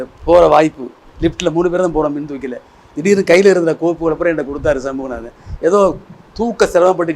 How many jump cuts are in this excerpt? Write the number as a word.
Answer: zero